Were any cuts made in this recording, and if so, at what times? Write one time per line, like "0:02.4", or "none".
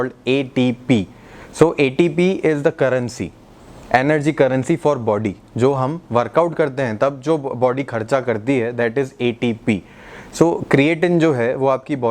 none